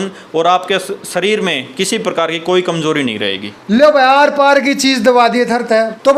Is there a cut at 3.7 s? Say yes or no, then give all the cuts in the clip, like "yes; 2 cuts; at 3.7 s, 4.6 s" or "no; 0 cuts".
no; 0 cuts